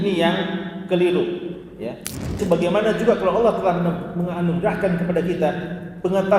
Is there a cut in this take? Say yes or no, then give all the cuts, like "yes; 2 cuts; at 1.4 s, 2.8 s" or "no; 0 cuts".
yes; 1 cut; at 2.4 s